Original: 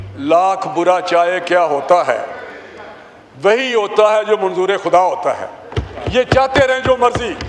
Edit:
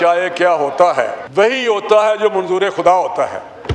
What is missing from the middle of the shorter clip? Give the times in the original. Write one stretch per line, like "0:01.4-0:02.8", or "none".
0:02.3-0:03.3